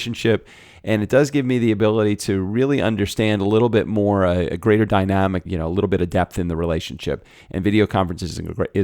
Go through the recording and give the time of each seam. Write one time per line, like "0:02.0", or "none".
0:05.4